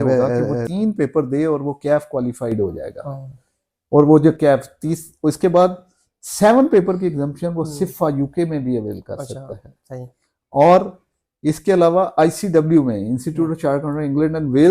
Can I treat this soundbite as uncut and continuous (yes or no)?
yes